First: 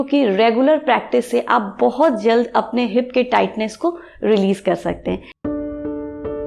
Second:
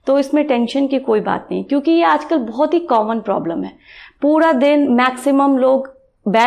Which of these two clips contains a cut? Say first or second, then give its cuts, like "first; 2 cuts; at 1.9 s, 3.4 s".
first; 1 cut; at 5.3 s